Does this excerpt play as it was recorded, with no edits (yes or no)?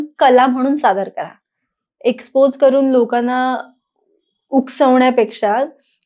yes